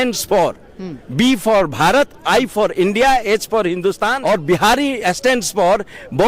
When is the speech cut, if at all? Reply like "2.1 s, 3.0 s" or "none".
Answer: 4.1 s